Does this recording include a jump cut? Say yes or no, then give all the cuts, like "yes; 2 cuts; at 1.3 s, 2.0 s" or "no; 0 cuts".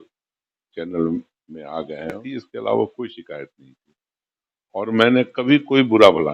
yes; 1 cut; at 2.2 s